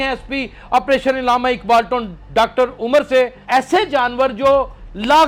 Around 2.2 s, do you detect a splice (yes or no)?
no